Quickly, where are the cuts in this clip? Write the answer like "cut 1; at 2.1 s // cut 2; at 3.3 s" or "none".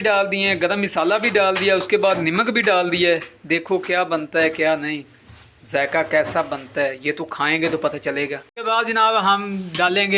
cut 1; at 8.5 s